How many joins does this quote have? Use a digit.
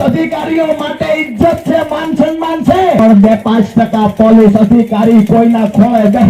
1